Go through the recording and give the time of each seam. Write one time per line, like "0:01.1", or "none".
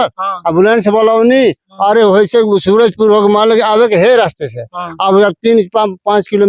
none

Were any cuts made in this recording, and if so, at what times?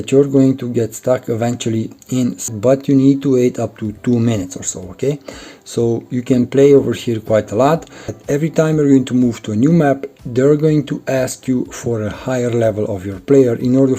0:02.5
0:08.1

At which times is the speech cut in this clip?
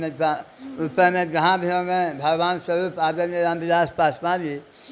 none

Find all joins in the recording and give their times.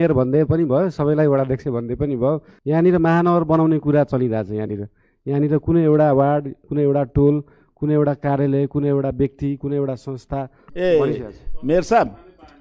0:02.5
0:10.6

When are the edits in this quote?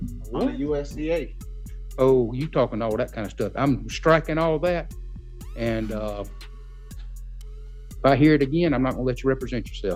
none

